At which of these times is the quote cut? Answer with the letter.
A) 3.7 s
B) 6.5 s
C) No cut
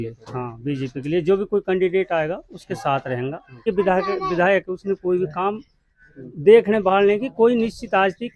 A